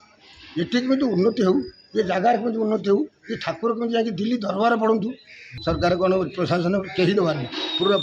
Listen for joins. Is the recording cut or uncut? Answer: cut